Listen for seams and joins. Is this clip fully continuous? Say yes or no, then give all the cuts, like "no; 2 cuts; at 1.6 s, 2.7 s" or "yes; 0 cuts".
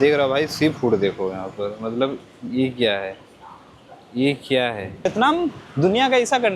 no; 1 cut; at 5.0 s